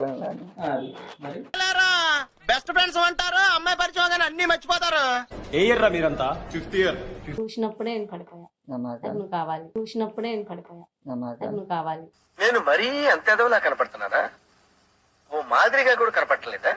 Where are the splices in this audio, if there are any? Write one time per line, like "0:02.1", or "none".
0:01.4
0:07.4